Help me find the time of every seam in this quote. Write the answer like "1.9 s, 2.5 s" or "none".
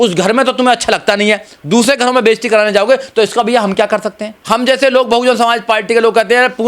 4.4 s